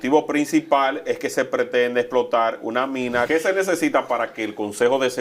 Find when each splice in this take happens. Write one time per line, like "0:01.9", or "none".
0:03.3